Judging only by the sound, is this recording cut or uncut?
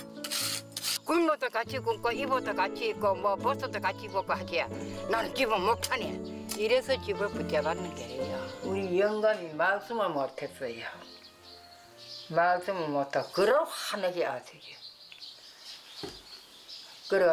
cut